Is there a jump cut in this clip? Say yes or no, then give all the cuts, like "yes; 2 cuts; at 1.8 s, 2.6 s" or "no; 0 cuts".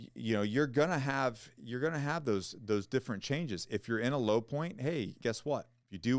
yes; 1 cut; at 5.2 s